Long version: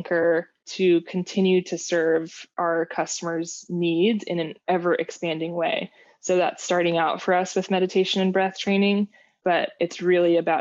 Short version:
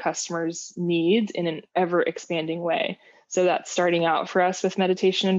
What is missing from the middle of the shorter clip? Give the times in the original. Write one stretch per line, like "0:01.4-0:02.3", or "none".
none